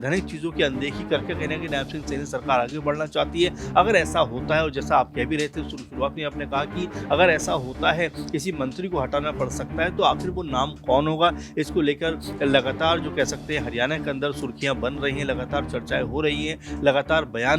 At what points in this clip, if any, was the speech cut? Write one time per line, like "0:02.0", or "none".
none

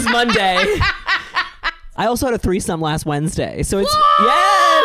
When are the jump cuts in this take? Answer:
0:02.0

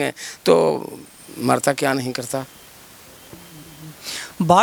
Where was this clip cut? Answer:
none

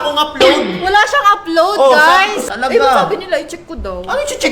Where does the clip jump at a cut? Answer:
0:02.5

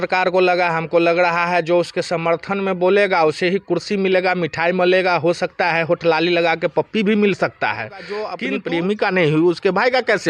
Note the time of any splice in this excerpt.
0:08.3

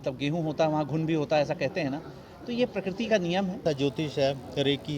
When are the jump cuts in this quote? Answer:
0:03.6

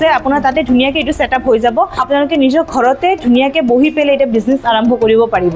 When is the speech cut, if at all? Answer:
0:02.0

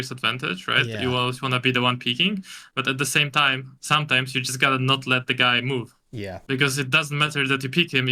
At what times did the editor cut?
none

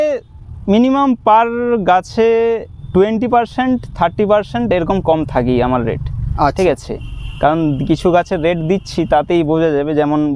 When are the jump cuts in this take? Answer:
none

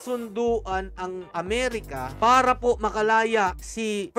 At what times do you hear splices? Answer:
none

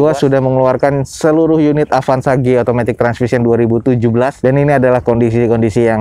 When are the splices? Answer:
none

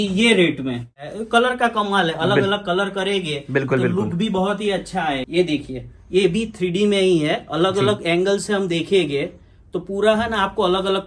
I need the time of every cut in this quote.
0:01.0
0:05.2

